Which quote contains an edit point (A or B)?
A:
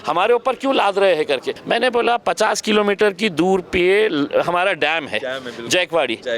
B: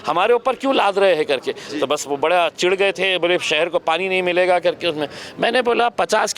A